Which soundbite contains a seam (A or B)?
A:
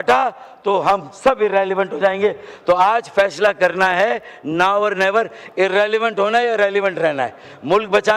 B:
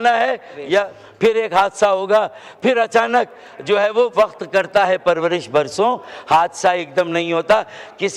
B